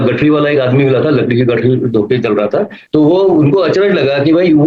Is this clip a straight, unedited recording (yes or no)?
no